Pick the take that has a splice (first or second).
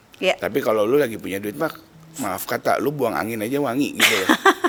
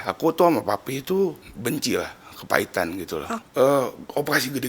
second